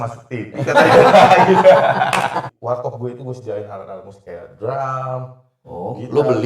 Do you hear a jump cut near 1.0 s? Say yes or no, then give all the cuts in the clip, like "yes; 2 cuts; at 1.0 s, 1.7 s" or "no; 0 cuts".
no; 1 cut; at 2.5 s